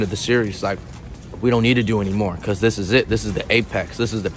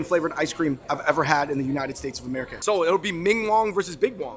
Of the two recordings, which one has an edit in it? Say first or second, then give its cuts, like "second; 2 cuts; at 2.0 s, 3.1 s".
second; 2 cuts; at 0.9 s, 2.5 s